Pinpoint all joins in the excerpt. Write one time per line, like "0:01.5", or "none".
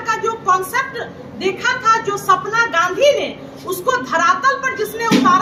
none